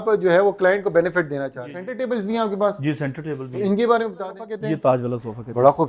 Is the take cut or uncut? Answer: cut